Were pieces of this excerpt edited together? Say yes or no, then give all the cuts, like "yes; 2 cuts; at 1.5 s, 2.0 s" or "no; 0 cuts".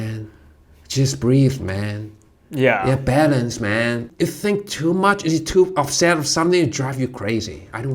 yes; 1 cut; at 4.0 s